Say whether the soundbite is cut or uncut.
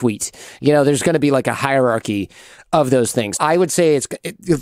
cut